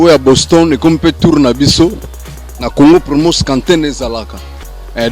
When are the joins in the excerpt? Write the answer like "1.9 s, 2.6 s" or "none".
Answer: none